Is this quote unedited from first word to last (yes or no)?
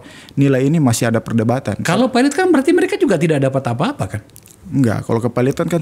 yes